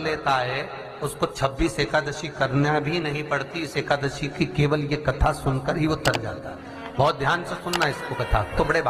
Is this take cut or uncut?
uncut